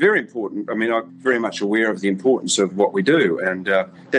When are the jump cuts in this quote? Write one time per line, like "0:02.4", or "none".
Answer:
0:01.1